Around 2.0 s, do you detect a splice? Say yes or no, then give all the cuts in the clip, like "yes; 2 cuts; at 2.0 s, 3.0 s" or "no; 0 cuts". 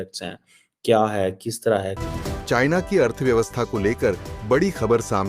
yes; 1 cut; at 2.0 s